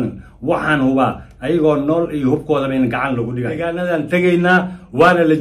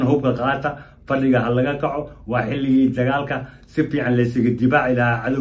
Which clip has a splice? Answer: first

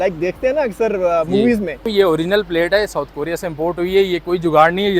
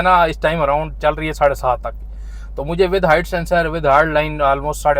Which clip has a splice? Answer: first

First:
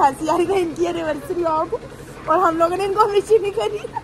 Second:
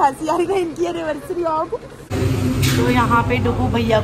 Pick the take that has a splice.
second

